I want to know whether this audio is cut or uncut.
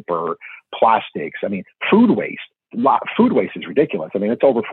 uncut